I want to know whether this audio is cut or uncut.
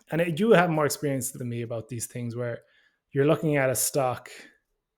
cut